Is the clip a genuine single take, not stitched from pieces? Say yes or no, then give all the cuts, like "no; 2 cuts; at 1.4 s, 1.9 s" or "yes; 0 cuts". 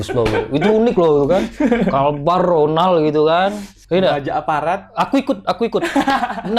yes; 0 cuts